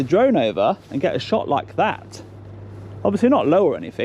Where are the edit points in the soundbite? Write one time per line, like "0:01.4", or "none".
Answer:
none